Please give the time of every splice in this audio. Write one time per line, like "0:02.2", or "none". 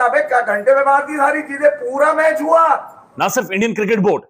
0:03.1